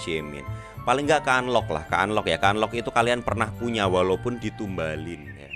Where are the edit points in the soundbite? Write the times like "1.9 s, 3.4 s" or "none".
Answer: none